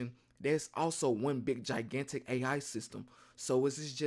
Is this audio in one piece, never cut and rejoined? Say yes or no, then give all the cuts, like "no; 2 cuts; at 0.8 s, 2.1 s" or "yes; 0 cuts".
yes; 0 cuts